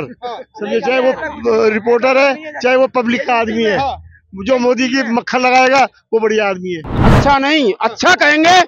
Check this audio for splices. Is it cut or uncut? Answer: cut